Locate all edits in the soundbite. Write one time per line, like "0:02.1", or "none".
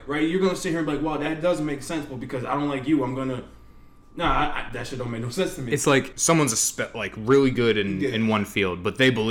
0:06.1